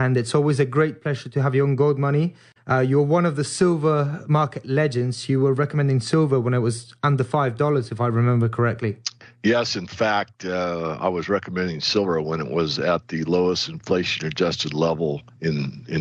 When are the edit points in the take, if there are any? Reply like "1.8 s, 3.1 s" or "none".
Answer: none